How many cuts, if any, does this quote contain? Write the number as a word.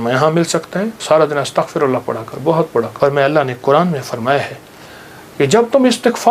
two